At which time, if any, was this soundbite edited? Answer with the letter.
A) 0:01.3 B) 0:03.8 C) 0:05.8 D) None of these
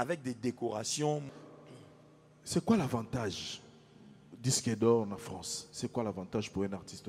A